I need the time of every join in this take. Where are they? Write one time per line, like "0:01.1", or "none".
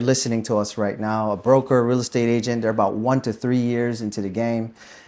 none